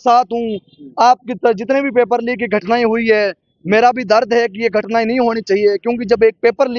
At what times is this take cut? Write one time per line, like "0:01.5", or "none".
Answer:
none